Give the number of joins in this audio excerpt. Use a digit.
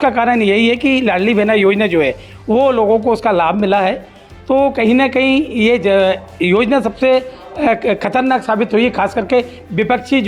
0